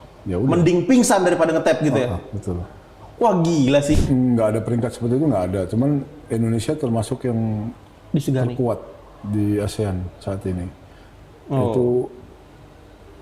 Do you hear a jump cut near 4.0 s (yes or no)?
yes